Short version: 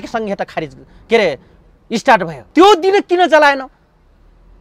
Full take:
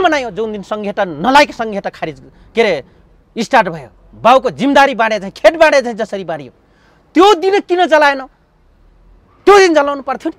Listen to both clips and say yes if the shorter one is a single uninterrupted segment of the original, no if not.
no